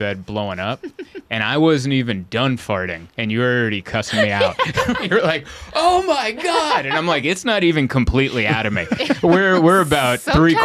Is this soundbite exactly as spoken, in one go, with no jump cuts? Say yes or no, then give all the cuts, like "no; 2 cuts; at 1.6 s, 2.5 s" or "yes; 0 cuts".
no; 1 cut; at 5.0 s